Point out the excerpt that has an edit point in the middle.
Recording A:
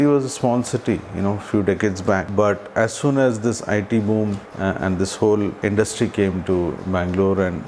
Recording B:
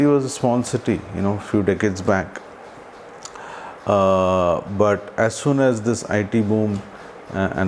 A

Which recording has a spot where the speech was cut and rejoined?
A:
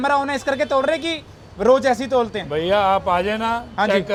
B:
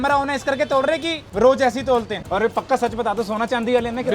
B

